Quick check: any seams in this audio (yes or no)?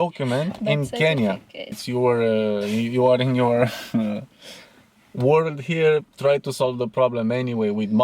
yes